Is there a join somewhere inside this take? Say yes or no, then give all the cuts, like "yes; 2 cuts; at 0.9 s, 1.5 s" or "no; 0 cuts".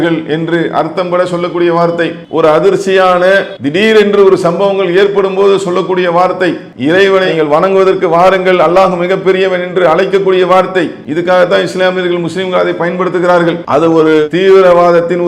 yes; 5 cuts; at 2.2 s, 3.6 s, 6.7 s, 11.0 s, 13.6 s